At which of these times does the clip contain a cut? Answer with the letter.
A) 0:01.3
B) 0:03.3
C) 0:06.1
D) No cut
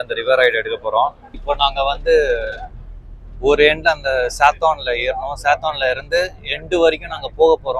A